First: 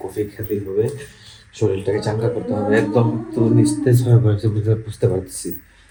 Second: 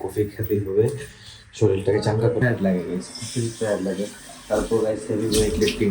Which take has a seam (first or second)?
second